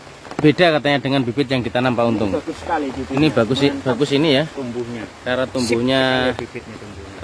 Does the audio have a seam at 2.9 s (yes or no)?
no